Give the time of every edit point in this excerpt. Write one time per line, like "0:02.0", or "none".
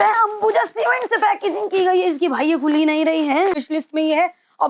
0:03.7